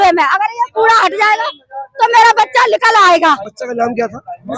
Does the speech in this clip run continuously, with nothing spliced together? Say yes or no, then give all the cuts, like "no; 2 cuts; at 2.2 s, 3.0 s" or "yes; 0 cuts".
yes; 0 cuts